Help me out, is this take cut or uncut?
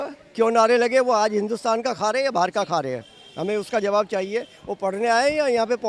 uncut